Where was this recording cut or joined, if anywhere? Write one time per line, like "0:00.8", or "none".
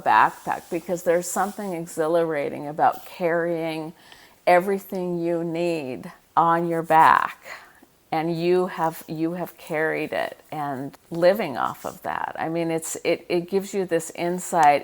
0:05.8
0:11.0